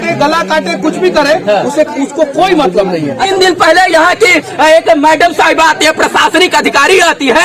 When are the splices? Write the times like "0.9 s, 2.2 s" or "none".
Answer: 3.3 s